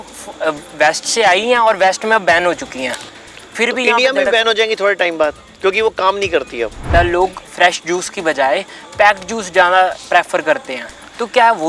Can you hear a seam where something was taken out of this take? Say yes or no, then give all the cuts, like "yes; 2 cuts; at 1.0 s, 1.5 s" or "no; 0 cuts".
yes; 1 cut; at 6.9 s